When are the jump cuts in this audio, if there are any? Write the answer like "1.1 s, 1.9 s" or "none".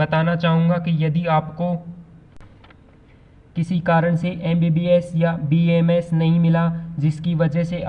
2.4 s